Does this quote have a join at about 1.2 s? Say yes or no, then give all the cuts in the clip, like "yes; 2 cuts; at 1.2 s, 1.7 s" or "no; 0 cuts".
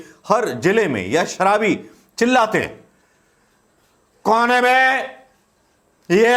no; 0 cuts